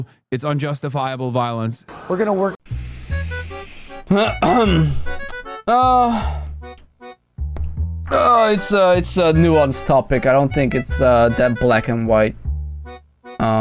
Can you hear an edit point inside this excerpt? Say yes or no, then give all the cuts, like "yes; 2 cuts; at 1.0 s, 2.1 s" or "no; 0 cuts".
no; 0 cuts